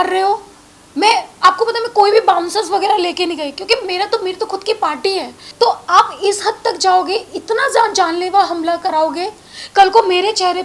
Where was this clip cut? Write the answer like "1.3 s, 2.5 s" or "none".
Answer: 5.4 s